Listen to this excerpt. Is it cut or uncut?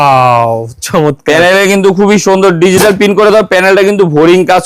uncut